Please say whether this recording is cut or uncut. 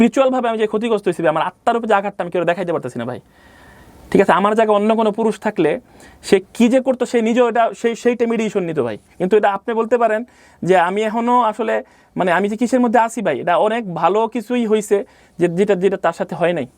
uncut